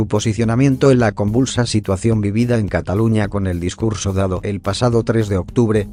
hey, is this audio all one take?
yes; 0 cuts

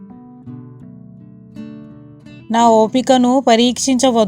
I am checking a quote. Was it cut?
yes; 1 cut; at 1.9 s

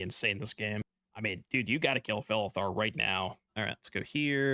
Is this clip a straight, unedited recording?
no; 2 cuts; at 1.0 s, 3.5 s

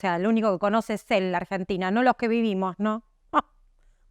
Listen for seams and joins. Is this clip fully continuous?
yes; 0 cuts

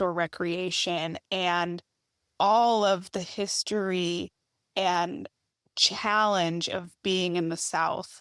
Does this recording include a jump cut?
no; 0 cuts

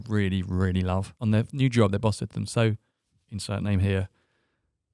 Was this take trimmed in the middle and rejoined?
yes; 1 cut; at 1.1 s

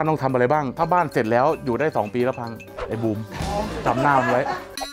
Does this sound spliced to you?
no; 0 cuts

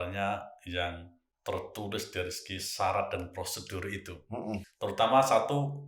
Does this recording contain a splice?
yes; 1 cut; at 4.7 s

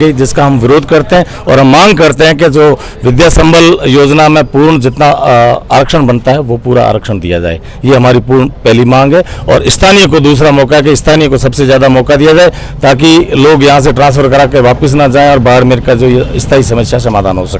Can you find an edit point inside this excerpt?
no; 0 cuts

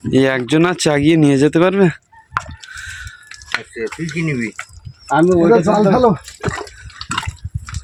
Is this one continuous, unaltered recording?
yes; 0 cuts

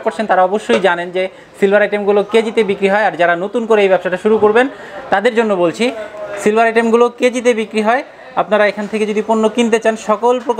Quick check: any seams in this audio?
no; 0 cuts

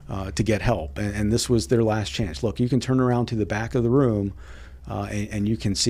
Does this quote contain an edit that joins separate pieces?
no; 0 cuts

